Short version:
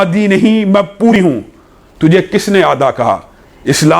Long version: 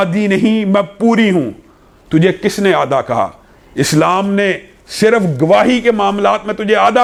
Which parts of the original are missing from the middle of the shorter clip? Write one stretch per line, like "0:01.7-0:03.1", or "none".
0:01.1-0:01.2